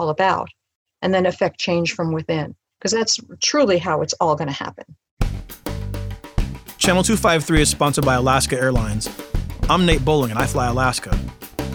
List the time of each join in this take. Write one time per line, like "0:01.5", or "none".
0:05.1